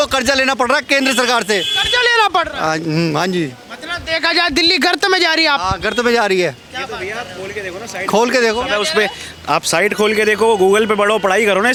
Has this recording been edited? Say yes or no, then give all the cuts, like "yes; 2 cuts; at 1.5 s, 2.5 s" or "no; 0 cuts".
no; 0 cuts